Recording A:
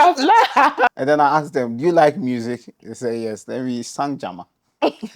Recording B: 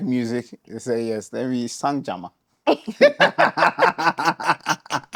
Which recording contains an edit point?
A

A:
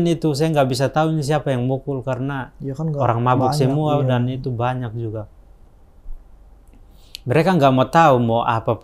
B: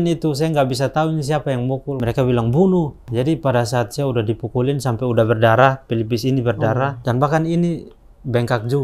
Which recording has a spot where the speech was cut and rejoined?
B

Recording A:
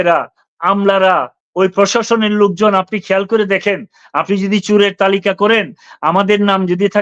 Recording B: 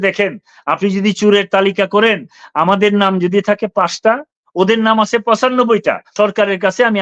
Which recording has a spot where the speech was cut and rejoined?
B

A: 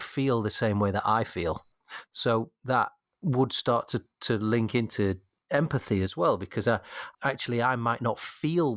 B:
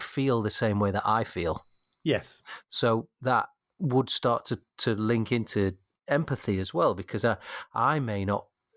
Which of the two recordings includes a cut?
A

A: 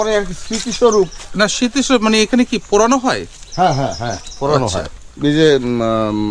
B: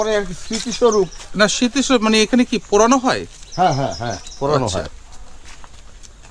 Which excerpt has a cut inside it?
A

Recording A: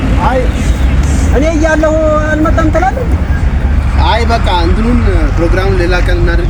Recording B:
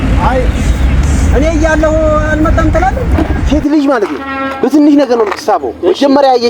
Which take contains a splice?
B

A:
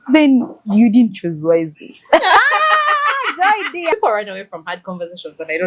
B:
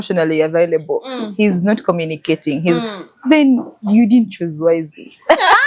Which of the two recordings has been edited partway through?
A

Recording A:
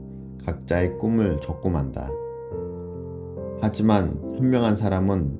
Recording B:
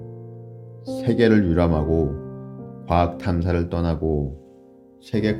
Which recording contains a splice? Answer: A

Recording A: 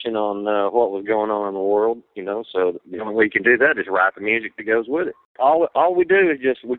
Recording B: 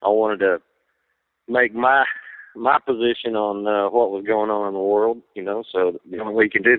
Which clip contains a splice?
A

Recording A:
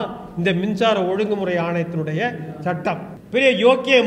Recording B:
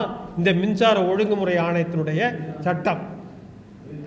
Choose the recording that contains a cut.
A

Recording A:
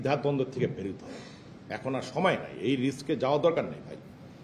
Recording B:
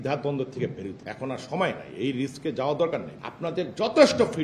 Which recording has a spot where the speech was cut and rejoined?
B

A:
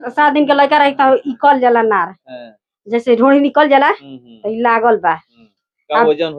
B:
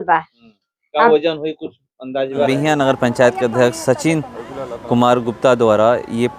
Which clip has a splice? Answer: B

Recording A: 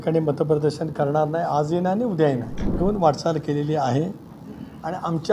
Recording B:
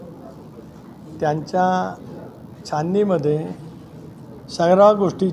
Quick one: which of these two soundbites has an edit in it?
A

